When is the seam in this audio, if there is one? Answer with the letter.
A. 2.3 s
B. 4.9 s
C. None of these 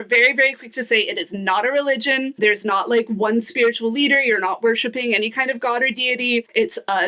C